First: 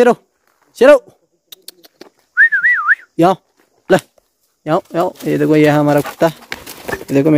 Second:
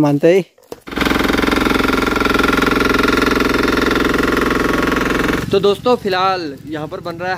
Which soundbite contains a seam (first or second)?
second